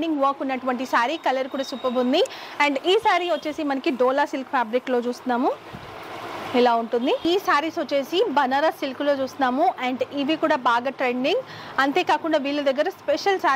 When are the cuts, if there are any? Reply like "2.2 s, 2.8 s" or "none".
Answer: 7.2 s